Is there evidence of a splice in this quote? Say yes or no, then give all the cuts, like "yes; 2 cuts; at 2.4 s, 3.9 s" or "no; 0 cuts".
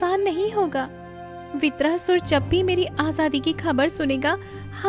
no; 0 cuts